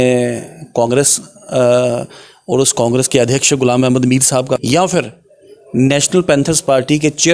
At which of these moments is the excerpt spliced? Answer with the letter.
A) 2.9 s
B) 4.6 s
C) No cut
B